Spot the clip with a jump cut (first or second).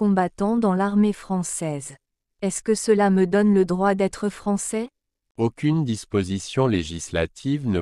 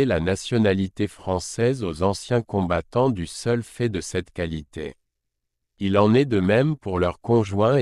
first